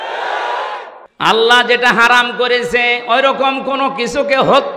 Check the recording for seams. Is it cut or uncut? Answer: cut